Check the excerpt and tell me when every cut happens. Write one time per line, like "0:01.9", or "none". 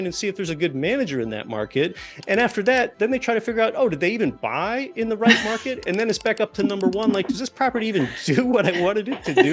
0:02.9